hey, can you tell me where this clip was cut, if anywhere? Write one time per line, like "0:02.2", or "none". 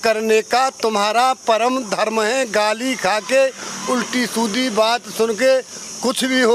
none